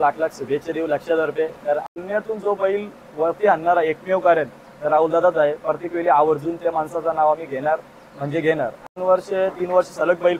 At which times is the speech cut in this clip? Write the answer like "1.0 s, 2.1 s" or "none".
1.9 s, 9.0 s